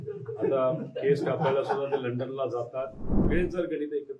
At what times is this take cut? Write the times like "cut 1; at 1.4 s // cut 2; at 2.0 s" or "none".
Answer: cut 1; at 3.2 s